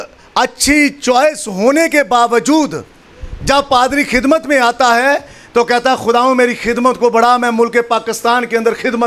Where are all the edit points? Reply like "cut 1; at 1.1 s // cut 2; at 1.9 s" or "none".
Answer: none